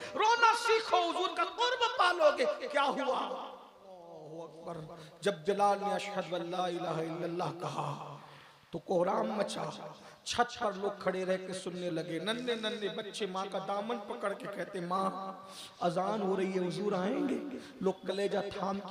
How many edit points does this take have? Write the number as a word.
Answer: one